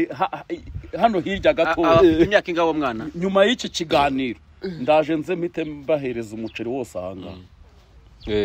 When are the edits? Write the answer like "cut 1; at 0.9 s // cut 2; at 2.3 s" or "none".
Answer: none